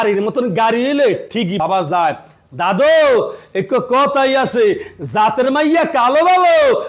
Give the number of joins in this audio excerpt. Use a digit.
0